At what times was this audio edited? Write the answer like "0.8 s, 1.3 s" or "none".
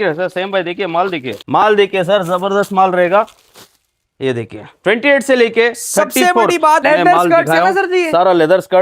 1.3 s, 6.8 s